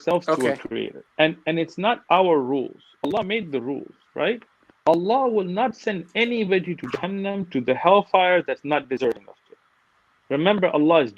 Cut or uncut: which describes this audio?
cut